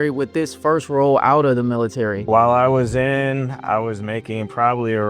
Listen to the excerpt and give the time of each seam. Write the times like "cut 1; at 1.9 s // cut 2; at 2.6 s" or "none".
none